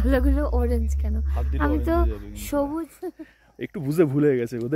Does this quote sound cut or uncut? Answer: cut